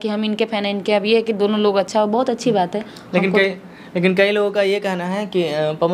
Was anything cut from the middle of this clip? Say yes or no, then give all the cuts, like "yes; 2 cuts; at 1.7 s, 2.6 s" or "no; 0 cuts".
no; 0 cuts